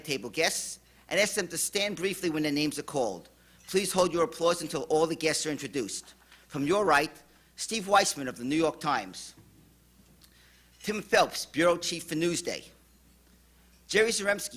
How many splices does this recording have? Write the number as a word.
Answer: one